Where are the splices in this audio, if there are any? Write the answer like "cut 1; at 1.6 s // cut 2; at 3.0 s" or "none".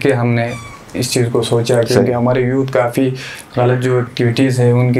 cut 1; at 4.1 s